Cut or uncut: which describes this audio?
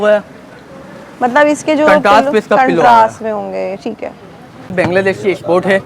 cut